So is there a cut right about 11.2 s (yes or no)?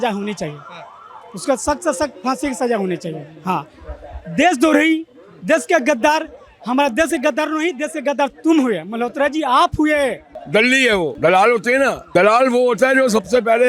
yes